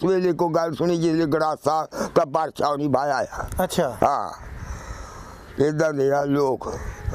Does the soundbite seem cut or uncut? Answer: uncut